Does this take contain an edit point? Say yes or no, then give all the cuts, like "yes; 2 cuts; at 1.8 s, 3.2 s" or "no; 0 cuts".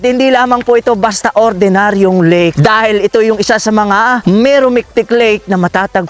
yes; 2 cuts; at 2.5 s, 4.2 s